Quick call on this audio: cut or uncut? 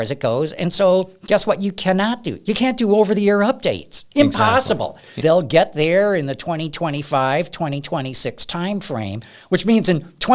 cut